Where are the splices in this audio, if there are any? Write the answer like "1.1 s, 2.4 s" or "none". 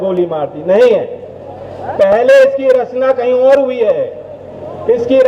none

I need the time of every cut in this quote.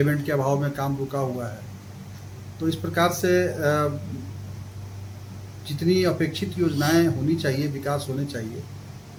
none

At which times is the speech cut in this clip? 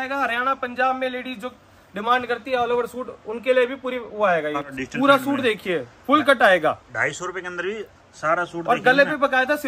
4.7 s

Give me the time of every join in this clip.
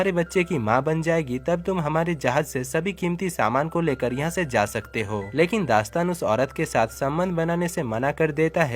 5.3 s

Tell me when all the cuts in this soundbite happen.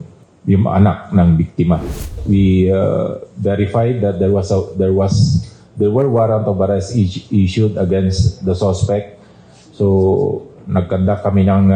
1.9 s

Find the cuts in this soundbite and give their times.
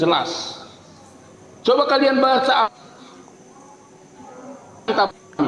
none

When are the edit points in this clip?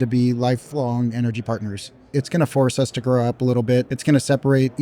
2.1 s, 3.9 s

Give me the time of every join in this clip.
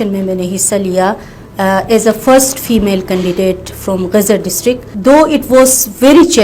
none

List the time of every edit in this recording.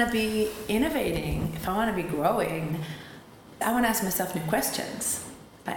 3.6 s

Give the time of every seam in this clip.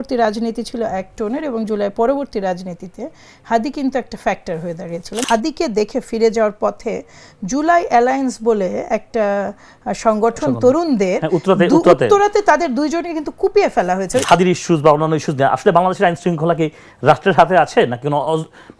5.2 s, 14.2 s

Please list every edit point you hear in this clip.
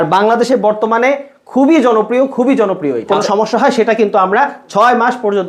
3.1 s

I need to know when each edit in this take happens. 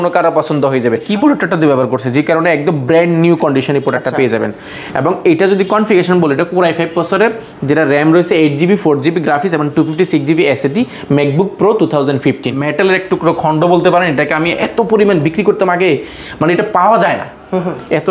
1.1 s, 12.6 s

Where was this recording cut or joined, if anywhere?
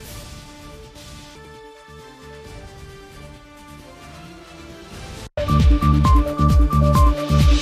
none

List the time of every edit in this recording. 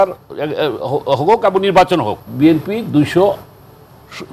2.2 s

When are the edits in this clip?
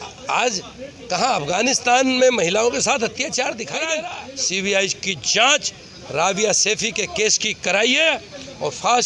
3.9 s

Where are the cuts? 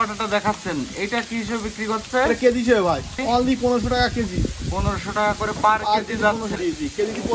3.1 s, 6.6 s

